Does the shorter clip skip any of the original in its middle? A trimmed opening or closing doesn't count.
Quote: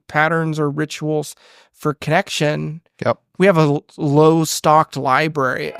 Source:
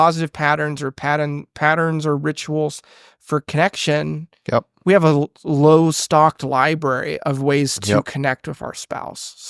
no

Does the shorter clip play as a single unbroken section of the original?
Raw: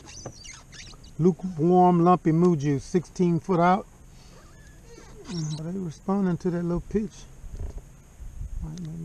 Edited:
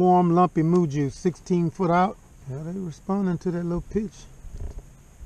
no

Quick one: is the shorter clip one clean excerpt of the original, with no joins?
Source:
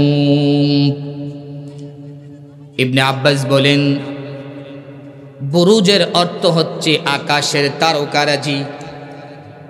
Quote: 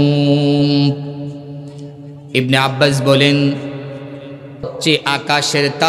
no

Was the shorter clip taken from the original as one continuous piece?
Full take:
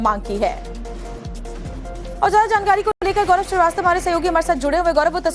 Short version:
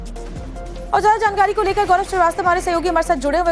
no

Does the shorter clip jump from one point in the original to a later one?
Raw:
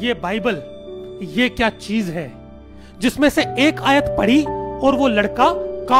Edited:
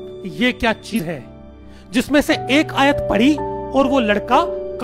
yes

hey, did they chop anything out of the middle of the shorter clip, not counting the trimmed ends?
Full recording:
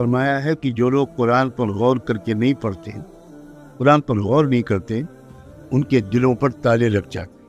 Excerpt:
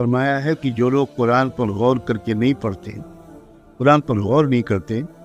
no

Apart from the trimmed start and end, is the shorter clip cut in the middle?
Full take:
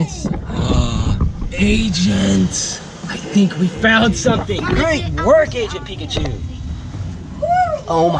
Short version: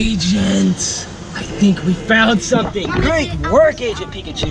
no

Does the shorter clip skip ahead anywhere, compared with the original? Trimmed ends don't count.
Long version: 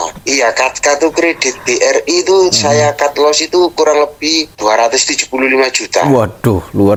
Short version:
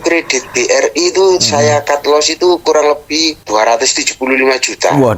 no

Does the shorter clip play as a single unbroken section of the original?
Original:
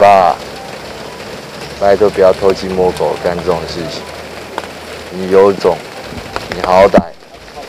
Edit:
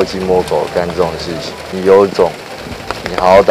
no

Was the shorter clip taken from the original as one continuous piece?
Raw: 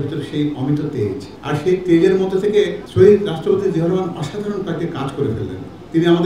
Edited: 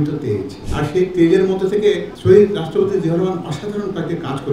yes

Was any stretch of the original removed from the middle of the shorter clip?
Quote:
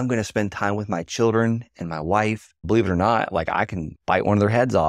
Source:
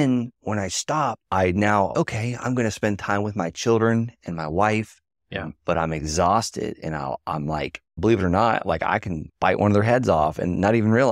yes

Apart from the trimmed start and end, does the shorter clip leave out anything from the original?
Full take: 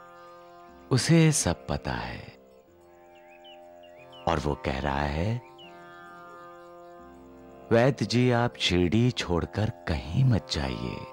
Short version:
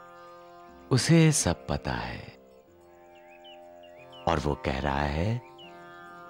no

